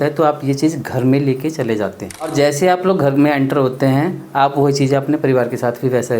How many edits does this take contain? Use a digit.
1